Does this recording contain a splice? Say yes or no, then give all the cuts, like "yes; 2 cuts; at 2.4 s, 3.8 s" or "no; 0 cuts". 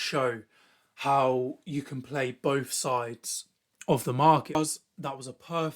yes; 1 cut; at 4.6 s